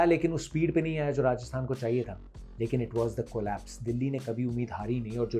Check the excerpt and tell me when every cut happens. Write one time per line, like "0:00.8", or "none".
none